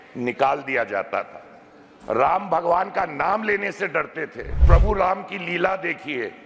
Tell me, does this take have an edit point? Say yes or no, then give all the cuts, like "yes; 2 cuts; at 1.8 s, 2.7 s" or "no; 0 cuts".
yes; 1 cut; at 4.6 s